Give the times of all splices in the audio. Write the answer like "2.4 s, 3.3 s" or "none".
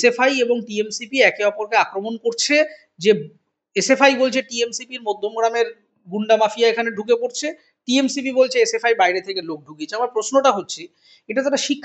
none